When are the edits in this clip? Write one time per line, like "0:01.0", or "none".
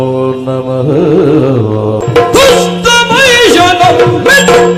0:02.0